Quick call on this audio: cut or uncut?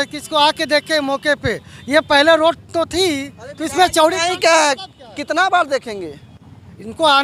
uncut